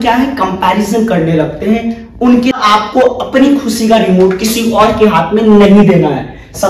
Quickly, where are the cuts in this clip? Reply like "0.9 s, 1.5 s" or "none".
2.5 s